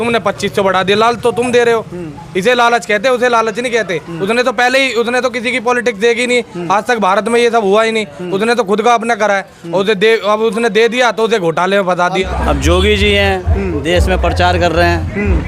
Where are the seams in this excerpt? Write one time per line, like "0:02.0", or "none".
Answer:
0:12.2